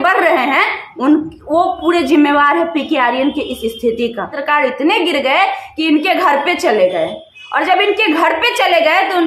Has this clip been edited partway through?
yes; 1 cut; at 4.4 s

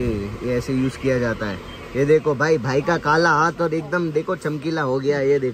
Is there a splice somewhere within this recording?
no; 0 cuts

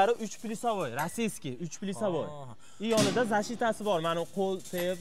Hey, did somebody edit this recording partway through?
no; 0 cuts

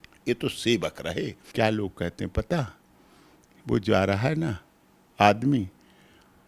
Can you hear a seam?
yes; 1 cut; at 1.4 s

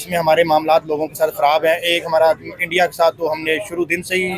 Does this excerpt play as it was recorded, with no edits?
yes; 0 cuts

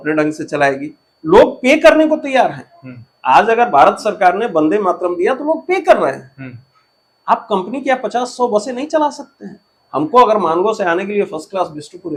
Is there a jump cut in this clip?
no; 0 cuts

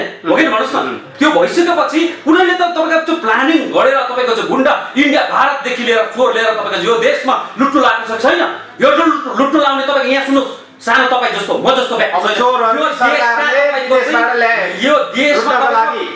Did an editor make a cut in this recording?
no; 0 cuts

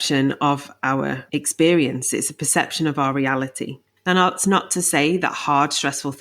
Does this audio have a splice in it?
yes; 1 cut; at 1.2 s

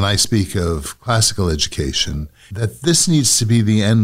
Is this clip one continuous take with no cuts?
no; 1 cut; at 2.5 s

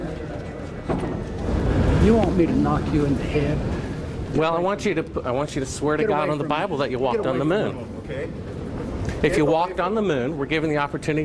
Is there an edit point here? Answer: yes; 1 cut; at 1.4 s

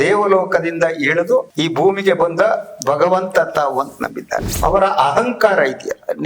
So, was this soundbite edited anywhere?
yes; 2 cuts; at 1.5 s, 4.5 s

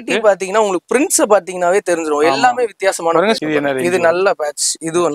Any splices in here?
yes; 1 cut; at 3.4 s

